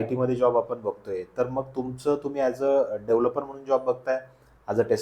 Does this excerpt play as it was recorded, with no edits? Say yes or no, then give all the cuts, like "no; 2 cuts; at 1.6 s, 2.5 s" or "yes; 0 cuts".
yes; 0 cuts